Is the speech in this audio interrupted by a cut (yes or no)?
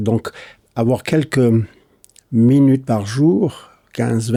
no